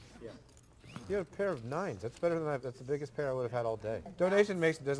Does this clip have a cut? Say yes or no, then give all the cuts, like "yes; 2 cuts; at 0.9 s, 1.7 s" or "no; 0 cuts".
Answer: yes; 1 cut; at 4.1 s